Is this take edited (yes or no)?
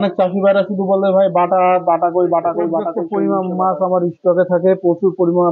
yes